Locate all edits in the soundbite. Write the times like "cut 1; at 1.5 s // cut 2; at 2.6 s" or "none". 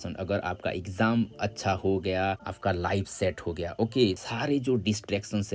cut 1; at 2.4 s // cut 2; at 4.2 s